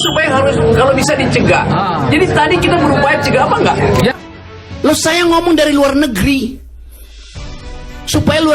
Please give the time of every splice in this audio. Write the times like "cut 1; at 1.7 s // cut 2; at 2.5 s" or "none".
cut 1; at 4.2 s